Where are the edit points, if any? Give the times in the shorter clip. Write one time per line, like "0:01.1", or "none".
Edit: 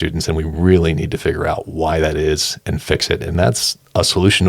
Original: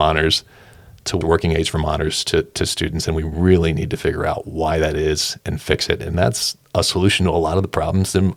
none